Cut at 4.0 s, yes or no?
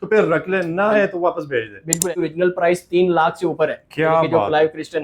no